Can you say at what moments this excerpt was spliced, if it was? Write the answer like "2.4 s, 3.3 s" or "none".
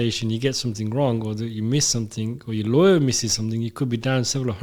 none

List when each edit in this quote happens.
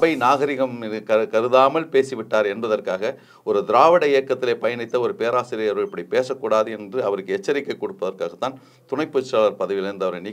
none

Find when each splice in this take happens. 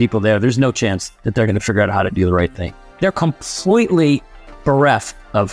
1.1 s, 2.9 s

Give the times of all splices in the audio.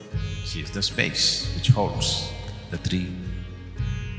none

